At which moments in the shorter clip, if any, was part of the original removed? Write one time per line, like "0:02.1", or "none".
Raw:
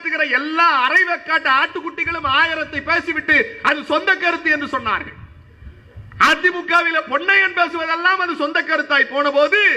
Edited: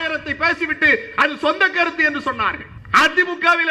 0:02.7